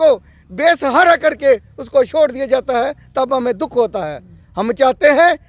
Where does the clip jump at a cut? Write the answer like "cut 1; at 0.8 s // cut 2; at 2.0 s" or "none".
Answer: none